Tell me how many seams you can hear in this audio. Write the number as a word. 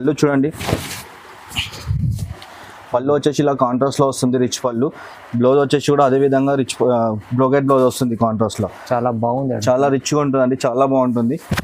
zero